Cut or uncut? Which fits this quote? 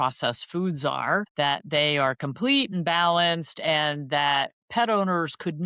cut